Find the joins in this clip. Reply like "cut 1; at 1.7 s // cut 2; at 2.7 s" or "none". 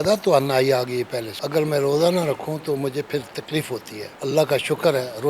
cut 1; at 1.4 s // cut 2; at 4.0 s